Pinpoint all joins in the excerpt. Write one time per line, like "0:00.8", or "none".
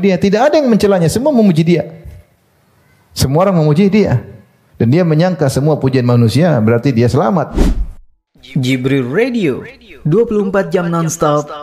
0:07.5